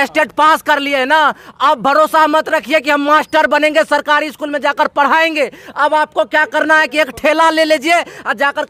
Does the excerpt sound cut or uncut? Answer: uncut